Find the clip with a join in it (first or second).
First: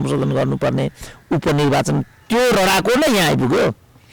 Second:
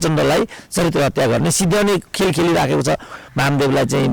second